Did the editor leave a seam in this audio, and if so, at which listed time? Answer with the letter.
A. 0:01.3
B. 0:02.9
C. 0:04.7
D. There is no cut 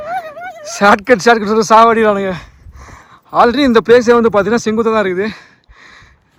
D